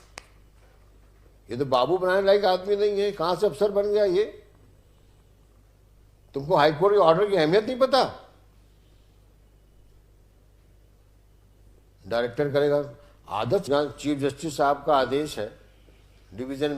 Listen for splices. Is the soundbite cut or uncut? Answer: cut